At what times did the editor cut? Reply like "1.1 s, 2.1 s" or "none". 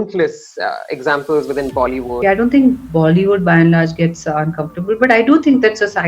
2.2 s